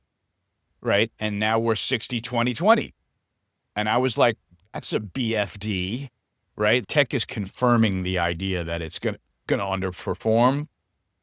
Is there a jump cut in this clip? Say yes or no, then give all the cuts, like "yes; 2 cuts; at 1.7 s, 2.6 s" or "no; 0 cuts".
yes; 1 cut; at 6.8 s